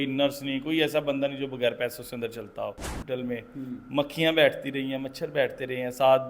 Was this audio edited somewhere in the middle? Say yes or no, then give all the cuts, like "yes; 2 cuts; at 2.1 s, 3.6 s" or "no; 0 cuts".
yes; 1 cut; at 2.9 s